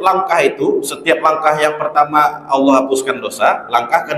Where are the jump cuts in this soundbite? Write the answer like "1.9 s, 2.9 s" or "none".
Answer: none